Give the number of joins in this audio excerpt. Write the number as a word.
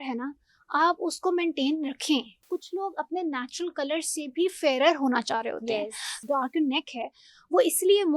two